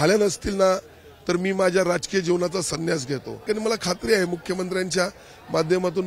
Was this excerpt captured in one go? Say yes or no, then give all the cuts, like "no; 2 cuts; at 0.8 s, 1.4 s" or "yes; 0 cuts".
no; 1 cut; at 3.4 s